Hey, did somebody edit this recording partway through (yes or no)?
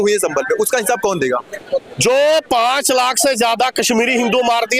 yes